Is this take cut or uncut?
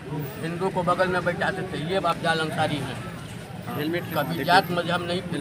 uncut